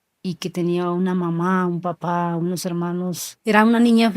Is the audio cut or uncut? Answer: cut